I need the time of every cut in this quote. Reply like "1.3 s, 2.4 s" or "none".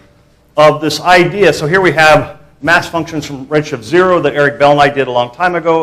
3.8 s